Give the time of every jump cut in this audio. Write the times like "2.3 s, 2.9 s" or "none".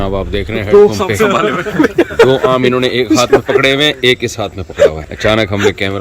5.1 s

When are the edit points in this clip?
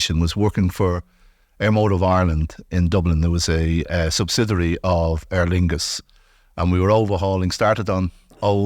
none

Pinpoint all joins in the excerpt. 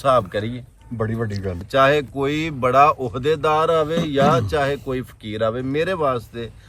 1.6 s

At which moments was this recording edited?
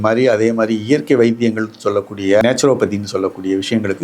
2.4 s

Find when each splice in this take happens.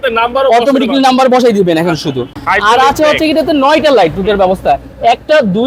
none

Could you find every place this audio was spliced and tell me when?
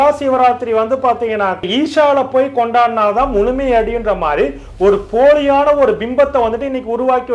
1.6 s

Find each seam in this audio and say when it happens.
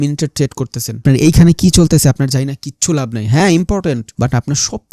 1.0 s, 4.1 s

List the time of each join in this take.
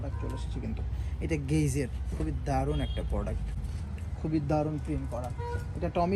none

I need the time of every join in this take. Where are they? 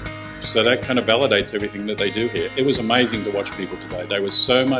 2.5 s

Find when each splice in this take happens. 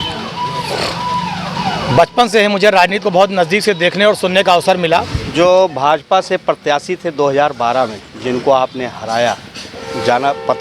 1.6 s, 5.2 s

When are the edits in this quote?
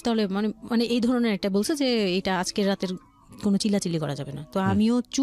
none

